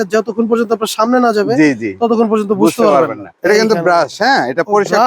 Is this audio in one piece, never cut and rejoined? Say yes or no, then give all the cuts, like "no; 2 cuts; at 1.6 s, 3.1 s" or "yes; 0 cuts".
no; 1 cut; at 3.3 s